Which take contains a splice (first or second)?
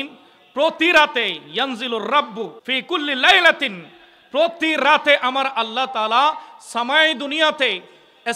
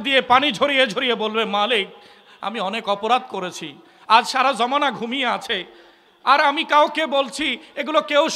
first